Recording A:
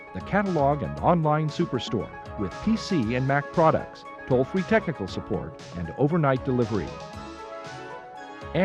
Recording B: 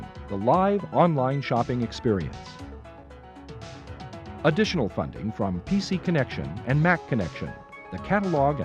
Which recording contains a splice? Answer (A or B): B